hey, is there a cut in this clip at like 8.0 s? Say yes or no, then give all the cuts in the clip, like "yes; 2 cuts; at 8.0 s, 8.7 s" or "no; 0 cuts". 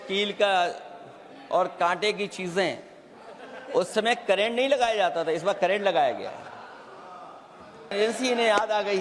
yes; 1 cut; at 8.0 s